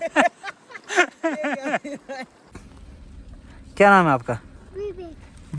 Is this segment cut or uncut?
cut